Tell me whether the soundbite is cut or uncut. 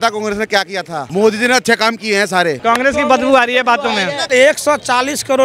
cut